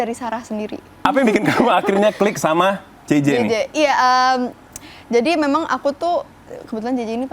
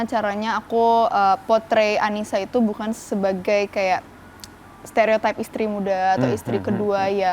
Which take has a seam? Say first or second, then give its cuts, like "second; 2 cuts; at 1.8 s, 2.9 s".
first; 1 cut; at 1.0 s